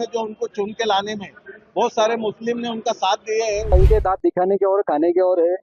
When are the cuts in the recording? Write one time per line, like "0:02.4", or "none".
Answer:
0:03.7